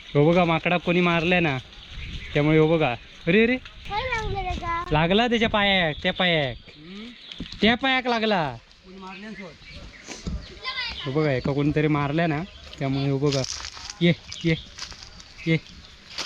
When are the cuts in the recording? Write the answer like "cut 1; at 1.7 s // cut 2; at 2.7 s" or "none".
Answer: cut 1; at 3.8 s